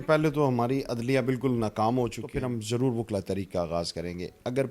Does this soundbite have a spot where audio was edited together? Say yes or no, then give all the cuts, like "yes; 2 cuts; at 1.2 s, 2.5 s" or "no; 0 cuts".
yes; 1 cut; at 2.3 s